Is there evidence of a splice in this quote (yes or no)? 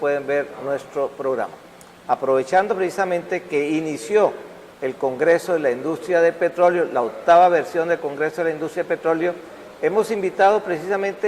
yes